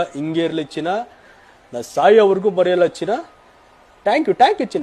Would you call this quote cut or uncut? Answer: uncut